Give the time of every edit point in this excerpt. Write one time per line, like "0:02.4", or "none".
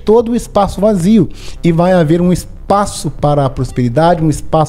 none